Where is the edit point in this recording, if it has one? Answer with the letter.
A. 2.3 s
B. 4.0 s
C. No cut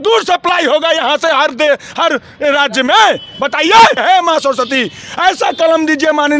B